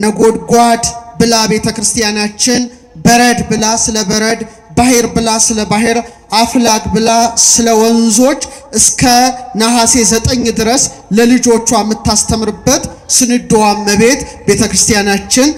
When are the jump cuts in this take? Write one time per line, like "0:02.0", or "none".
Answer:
none